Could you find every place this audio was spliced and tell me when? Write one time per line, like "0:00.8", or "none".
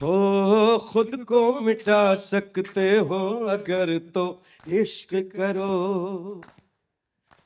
none